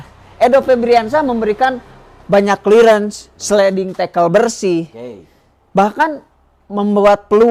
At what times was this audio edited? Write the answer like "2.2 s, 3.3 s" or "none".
none